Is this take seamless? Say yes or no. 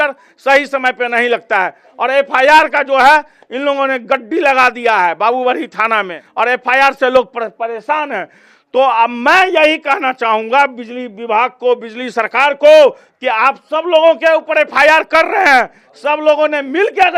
yes